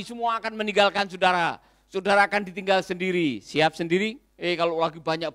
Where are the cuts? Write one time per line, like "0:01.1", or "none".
0:04.3